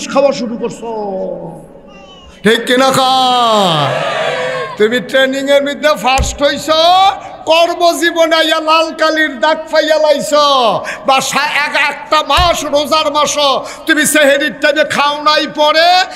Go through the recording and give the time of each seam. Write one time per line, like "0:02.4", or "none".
none